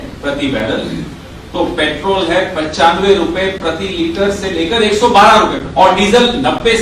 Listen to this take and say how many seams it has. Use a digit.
1